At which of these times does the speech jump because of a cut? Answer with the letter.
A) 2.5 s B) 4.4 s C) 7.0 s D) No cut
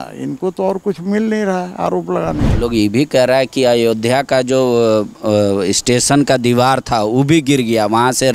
A